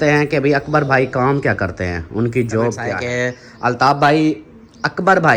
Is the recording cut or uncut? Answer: cut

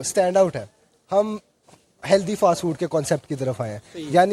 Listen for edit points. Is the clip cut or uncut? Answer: uncut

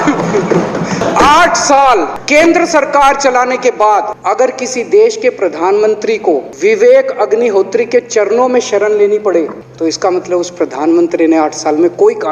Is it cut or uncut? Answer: cut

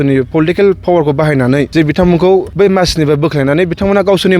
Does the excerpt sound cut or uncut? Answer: cut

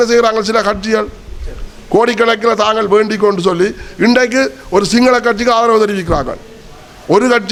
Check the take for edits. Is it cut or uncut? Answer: uncut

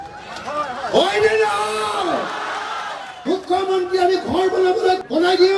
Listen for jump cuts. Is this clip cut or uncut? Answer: cut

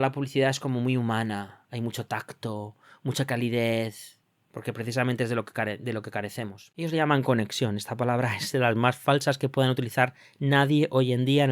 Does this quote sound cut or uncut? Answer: cut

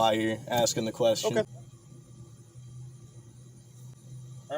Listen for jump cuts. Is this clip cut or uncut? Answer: cut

